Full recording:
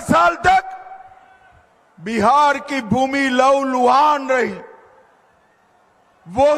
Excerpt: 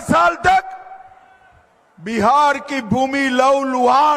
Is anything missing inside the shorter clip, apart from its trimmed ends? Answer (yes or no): no